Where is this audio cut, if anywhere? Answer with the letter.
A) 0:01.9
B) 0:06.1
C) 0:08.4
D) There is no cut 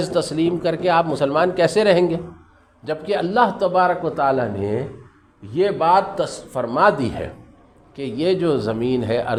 D